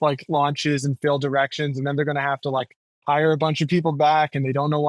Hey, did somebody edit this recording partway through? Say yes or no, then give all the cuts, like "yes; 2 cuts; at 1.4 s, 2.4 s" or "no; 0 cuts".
no; 0 cuts